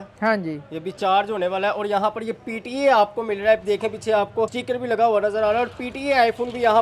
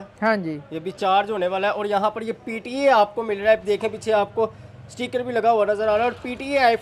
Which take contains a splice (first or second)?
first